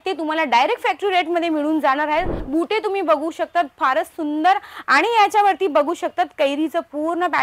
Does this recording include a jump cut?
yes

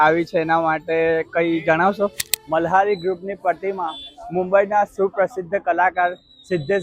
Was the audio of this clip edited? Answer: yes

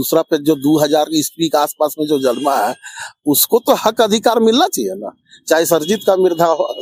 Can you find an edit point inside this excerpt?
no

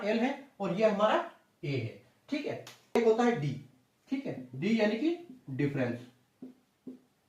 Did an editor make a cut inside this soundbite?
yes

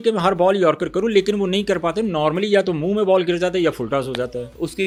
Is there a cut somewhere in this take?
no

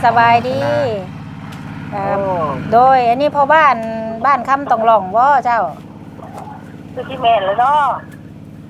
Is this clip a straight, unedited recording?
yes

